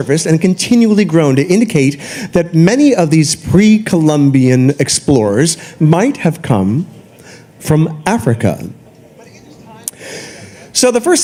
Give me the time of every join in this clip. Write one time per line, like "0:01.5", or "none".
none